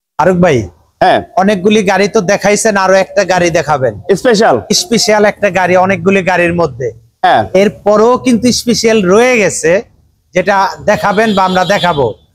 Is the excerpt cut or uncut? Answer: uncut